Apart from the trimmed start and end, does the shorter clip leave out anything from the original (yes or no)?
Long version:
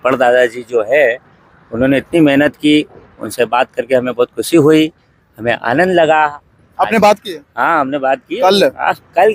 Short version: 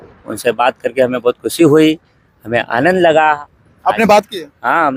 no